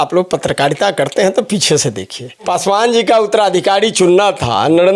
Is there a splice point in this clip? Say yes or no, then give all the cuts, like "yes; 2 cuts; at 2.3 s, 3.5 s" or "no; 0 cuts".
yes; 1 cut; at 2.4 s